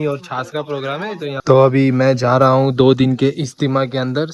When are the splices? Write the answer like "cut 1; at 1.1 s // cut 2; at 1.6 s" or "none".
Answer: cut 1; at 1.4 s